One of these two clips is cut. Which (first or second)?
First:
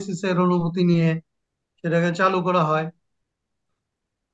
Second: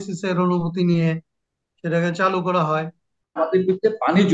second